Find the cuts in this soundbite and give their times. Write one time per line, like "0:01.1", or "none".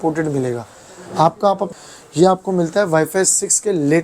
0:01.7